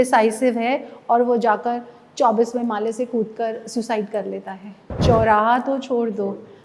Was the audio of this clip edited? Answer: yes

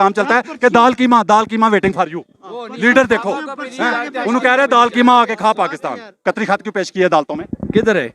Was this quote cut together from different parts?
yes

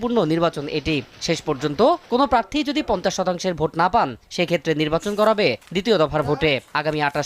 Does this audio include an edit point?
no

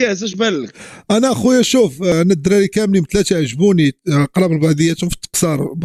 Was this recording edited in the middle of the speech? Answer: no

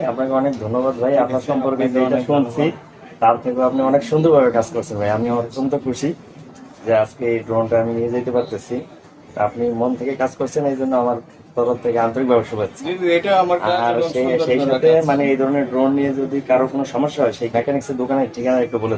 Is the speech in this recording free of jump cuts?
yes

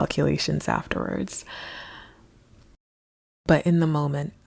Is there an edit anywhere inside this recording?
no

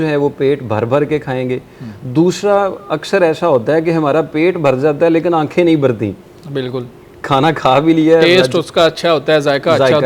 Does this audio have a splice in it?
no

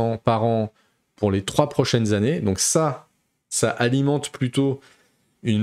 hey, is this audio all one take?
yes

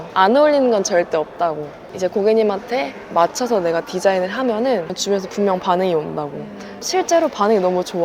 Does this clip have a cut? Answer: yes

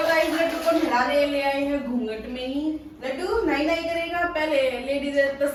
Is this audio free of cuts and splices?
yes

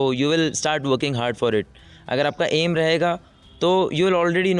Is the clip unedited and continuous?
yes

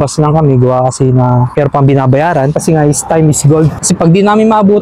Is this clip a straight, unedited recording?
no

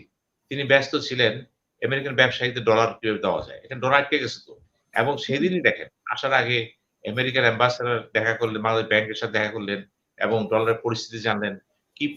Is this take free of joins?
yes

